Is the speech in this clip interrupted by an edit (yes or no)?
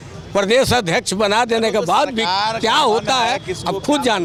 no